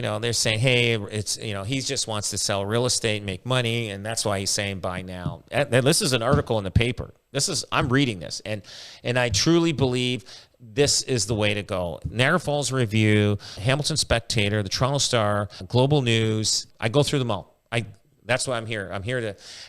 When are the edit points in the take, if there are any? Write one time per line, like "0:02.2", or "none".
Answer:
0:12.0
0:13.6
0:15.6
0:16.6